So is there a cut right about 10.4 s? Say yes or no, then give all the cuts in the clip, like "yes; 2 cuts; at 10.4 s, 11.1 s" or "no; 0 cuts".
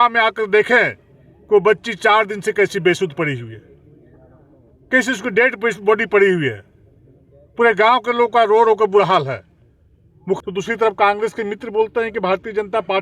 yes; 1 cut; at 10.4 s